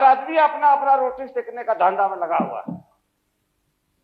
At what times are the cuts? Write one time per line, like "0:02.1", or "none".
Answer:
none